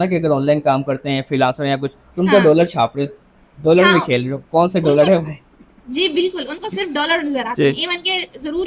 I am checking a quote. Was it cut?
no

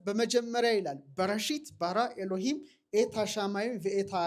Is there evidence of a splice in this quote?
no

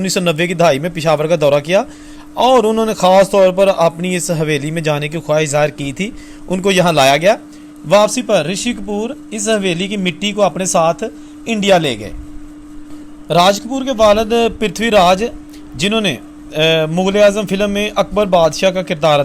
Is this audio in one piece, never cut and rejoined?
yes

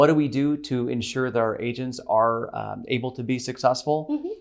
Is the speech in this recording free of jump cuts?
yes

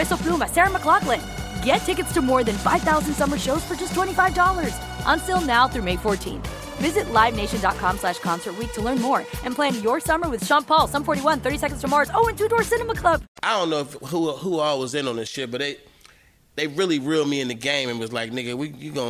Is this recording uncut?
no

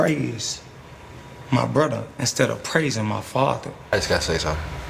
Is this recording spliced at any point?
yes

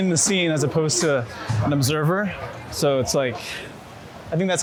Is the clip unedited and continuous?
yes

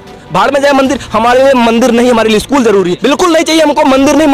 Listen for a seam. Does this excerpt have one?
yes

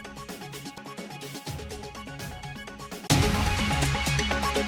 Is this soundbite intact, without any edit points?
yes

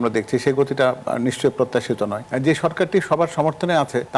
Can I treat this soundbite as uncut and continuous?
no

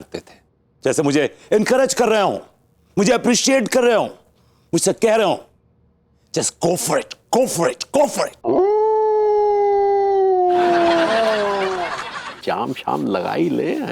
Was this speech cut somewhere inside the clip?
yes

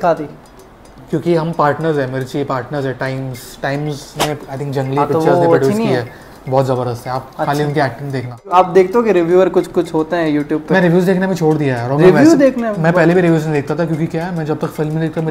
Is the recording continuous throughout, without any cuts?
no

